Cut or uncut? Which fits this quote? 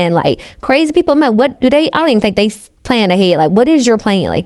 uncut